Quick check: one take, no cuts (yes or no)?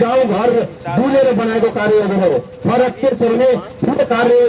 yes